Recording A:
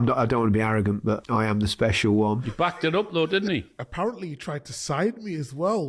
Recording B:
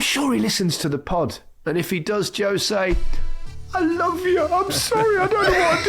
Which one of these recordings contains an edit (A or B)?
A